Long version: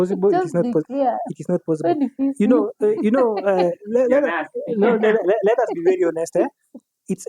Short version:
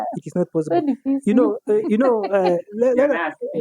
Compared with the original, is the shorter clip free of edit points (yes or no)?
yes